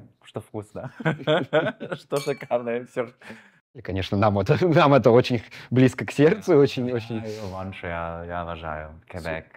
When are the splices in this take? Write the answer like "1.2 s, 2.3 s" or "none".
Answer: 3.8 s